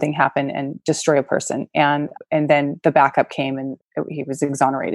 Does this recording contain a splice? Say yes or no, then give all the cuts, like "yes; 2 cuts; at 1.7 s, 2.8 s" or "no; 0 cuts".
no; 0 cuts